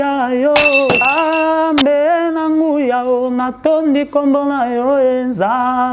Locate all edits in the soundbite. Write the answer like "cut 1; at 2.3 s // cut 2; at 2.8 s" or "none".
cut 1; at 1.0 s